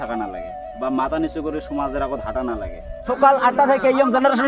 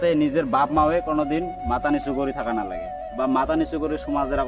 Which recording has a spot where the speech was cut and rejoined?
first; 1 cut; at 3.1 s

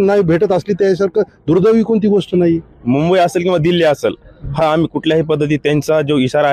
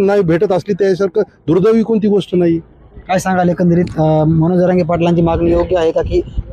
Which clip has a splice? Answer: first; 1 cut; at 2.7 s

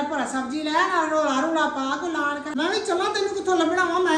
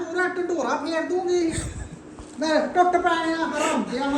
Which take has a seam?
first; 1 cut; at 2.4 s

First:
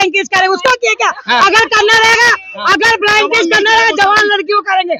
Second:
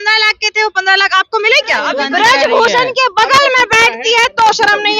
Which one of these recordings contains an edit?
second; 1 cut; at 2.0 s

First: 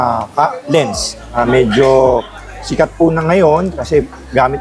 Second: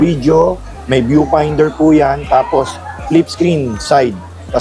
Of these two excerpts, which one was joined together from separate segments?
first; 1 cut; at 1.4 s

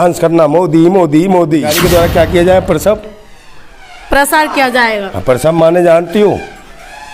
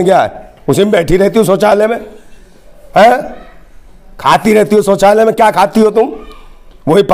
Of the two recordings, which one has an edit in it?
first; 1 cut; at 1.7 s

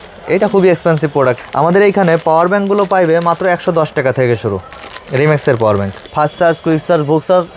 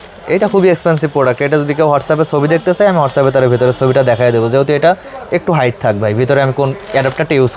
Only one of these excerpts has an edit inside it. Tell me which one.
first; 2 cuts; at 1.4 s, 6.0 s

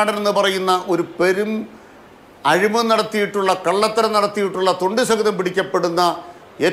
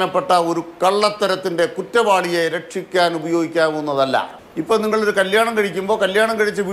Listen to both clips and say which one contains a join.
second; 1 cut; at 4.3 s

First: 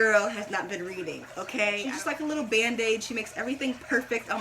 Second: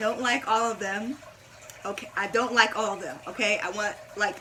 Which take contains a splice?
first; 1 cut; at 1.9 s

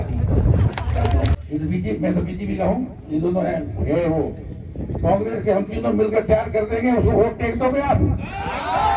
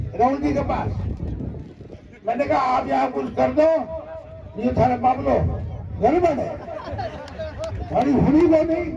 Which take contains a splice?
first; 1 cut; at 1.3 s

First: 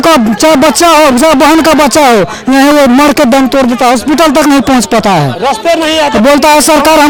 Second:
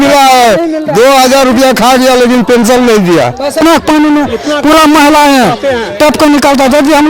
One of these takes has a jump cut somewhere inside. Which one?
second; 1 cut; at 3.6 s

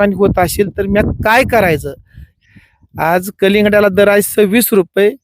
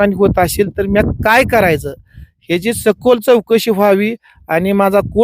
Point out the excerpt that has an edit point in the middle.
first; 1 cut; at 2.4 s

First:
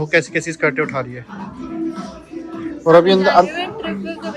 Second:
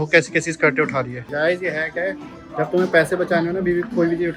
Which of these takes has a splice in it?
second; 1 cut; at 1.2 s

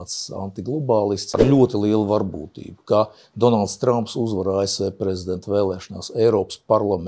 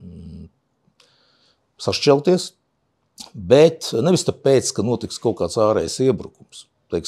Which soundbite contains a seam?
first; 1 cut; at 1.3 s

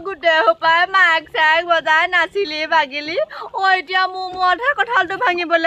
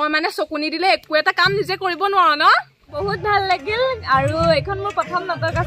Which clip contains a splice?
second; 1 cut; at 2.8 s

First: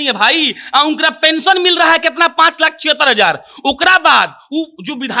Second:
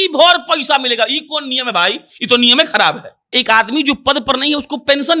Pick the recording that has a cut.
second; 1 cut; at 3.4 s

